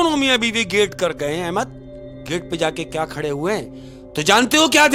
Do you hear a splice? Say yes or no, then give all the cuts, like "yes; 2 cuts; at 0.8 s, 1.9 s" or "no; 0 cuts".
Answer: no; 0 cuts